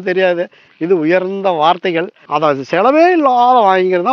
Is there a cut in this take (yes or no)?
yes